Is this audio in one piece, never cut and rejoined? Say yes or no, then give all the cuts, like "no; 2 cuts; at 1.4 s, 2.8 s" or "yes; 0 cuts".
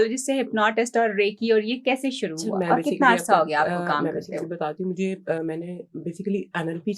yes; 0 cuts